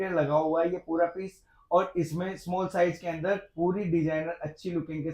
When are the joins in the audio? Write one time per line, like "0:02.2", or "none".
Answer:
none